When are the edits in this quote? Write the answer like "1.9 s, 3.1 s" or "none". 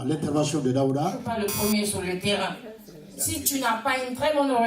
1.2 s